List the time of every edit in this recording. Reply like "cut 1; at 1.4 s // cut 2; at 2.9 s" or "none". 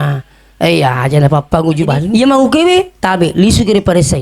cut 1; at 2.1 s